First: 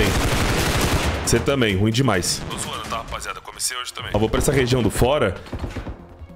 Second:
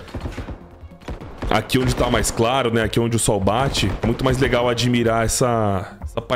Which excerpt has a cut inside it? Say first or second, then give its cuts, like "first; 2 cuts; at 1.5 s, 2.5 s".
first; 2 cuts; at 2.3 s, 3.9 s